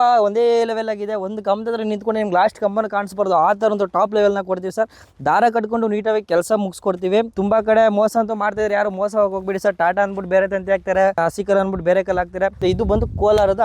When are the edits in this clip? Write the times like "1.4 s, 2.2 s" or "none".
7.3 s, 11.2 s, 12.6 s

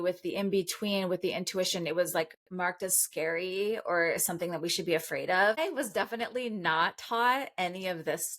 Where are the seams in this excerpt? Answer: 5.6 s

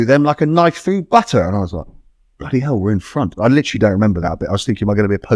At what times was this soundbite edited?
none

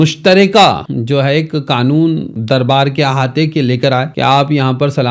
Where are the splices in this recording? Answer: 0.9 s, 2.3 s, 4.1 s

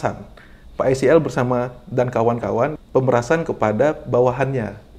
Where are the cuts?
2.8 s

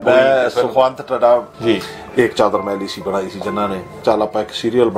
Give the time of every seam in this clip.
1.5 s, 4.0 s

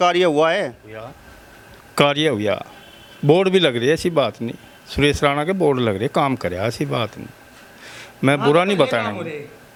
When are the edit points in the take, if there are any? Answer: none

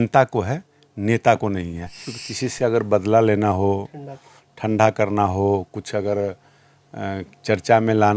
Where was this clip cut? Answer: 2.1 s

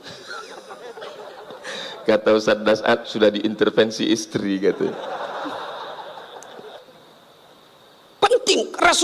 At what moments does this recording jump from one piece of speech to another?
6.8 s

